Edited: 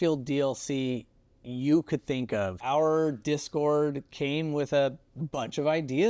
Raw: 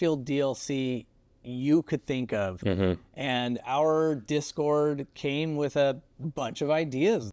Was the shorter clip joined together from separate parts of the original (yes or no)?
yes